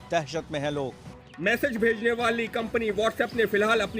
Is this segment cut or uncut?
cut